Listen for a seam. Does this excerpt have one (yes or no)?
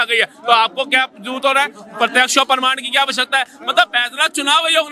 no